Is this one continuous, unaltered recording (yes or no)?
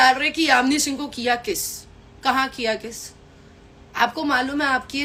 yes